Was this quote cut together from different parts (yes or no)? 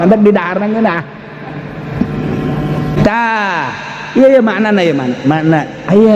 yes